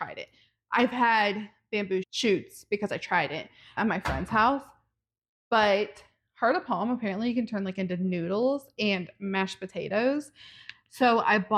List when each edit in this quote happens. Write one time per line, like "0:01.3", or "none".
none